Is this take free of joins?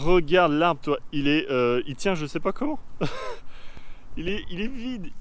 yes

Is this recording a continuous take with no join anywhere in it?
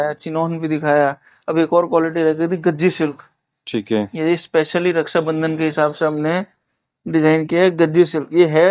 yes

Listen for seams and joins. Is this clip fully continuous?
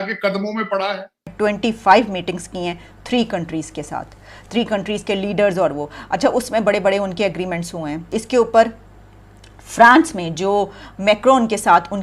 no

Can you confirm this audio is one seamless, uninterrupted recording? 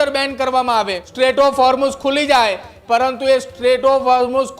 no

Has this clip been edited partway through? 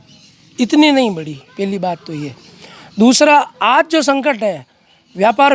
no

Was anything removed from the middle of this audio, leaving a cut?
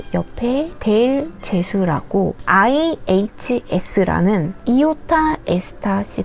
yes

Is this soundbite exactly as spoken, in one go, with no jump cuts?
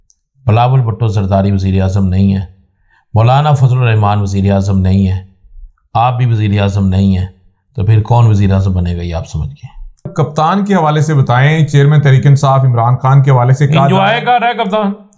no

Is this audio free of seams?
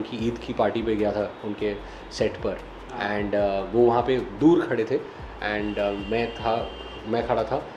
yes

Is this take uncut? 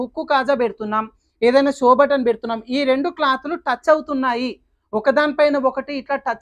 yes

